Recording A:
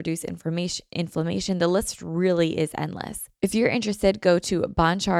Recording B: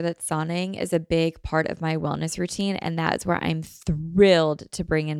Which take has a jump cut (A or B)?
A